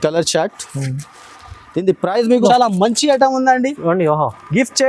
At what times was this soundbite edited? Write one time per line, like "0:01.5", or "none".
0:02.4